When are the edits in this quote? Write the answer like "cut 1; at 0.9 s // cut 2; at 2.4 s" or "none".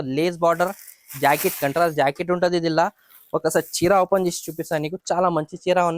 none